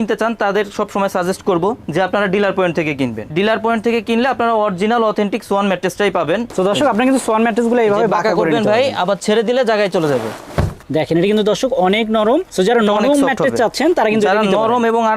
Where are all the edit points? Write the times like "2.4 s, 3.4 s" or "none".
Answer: 3.2 s, 6.5 s, 10.8 s